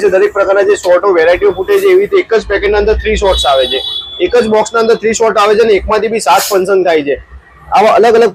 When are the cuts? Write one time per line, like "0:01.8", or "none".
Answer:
none